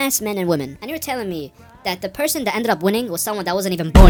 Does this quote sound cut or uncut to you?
uncut